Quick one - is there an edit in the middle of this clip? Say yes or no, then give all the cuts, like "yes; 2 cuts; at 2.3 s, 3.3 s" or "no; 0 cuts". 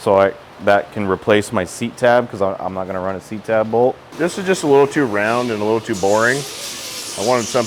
yes; 1 cut; at 4.1 s